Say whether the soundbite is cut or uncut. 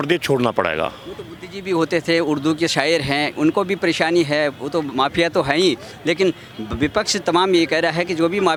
uncut